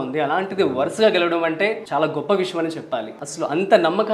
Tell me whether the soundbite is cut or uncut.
cut